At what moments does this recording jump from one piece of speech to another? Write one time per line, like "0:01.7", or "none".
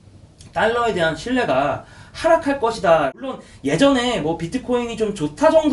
0:03.4

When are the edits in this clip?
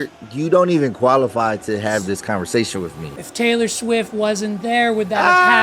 0:03.1

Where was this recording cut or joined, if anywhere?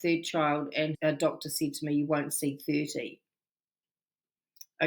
0:01.0

